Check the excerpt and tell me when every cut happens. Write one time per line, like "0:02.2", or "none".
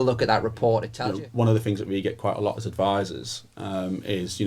0:00.9